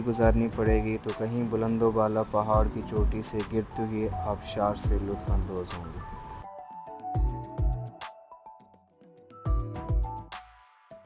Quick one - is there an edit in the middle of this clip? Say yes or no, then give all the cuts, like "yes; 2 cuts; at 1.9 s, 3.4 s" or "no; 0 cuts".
no; 0 cuts